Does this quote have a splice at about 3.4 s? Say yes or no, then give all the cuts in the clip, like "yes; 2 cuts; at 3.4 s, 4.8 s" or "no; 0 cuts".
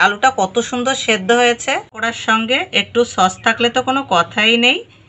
no; 1 cut; at 1.9 s